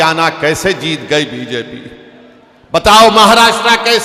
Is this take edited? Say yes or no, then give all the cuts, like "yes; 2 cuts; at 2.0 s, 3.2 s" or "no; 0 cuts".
no; 0 cuts